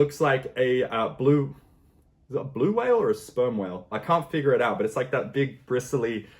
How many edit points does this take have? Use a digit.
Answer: 0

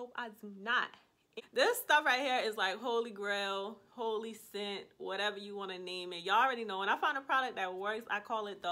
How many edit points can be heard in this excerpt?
1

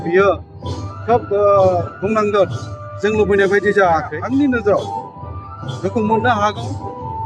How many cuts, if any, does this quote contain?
1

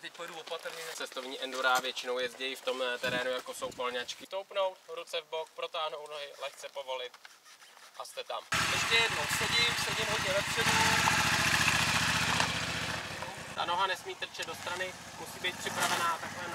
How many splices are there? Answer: 4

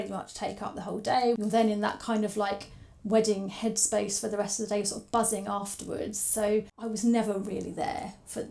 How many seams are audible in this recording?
2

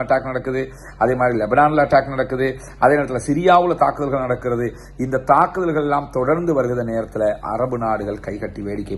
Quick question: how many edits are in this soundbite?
0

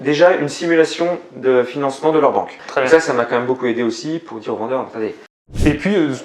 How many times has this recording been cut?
2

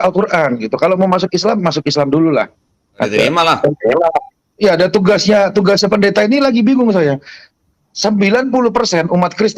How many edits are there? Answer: 1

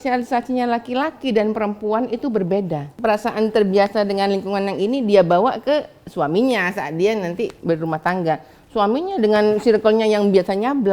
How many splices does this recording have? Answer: 1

